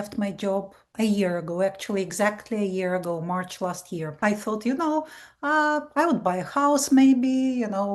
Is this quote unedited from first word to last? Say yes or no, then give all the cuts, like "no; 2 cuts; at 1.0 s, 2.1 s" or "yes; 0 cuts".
no; 1 cut; at 4.2 s